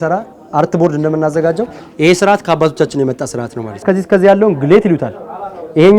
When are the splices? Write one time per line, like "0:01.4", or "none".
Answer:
0:03.8

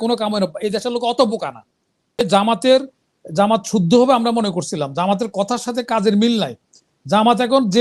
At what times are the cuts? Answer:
0:02.2

